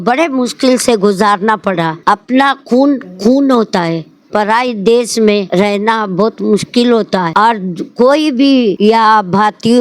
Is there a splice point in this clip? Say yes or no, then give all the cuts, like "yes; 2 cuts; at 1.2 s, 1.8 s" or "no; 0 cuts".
yes; 4 cuts; at 2.0 s, 5.5 s, 7.3 s, 8.8 s